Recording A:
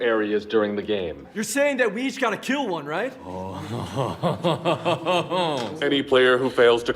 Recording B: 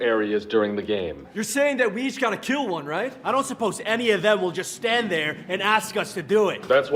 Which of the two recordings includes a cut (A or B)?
A